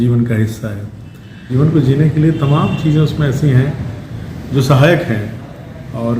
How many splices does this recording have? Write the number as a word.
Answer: one